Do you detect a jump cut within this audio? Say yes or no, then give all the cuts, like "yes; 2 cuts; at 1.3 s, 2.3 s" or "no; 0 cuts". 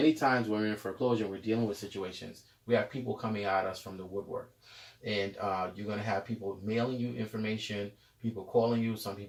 no; 0 cuts